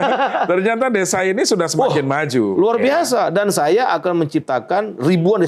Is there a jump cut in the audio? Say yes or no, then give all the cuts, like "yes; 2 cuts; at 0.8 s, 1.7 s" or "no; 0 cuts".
no; 0 cuts